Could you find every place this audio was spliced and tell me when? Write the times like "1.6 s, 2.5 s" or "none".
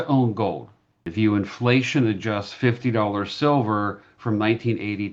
1.0 s